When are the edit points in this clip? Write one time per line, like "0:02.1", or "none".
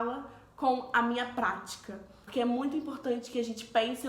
0:02.2